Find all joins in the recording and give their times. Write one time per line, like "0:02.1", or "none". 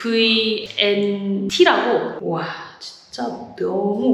0:02.1